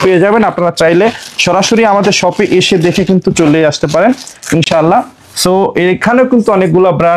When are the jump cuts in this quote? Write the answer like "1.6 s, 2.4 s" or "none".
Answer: none